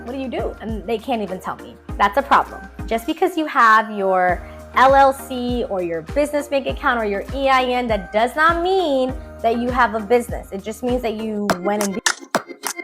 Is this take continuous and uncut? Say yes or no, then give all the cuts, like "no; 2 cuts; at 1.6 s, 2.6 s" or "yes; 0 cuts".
no; 1 cut; at 11.5 s